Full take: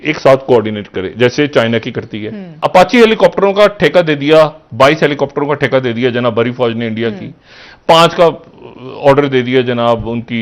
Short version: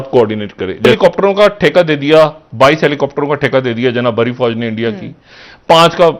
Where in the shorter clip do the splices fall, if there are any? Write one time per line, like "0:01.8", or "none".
0:00.9